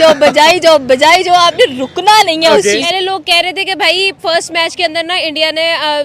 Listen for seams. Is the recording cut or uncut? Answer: cut